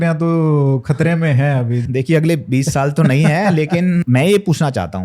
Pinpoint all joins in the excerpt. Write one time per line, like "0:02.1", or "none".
0:01.8
0:04.0